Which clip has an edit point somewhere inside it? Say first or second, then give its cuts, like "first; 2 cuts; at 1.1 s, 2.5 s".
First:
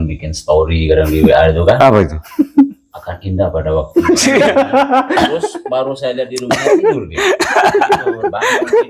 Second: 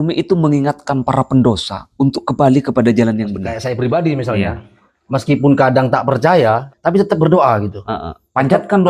second; 2 cuts; at 3.5 s, 6.7 s